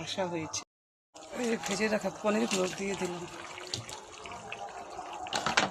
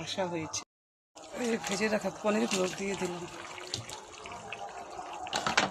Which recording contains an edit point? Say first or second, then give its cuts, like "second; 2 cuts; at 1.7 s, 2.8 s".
second; 1 cut; at 1.2 s